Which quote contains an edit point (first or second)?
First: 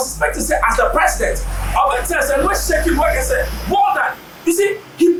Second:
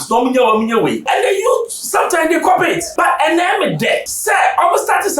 second